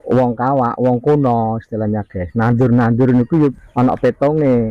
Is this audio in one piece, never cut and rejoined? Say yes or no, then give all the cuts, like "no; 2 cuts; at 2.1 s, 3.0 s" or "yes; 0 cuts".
no; 1 cut; at 3.5 s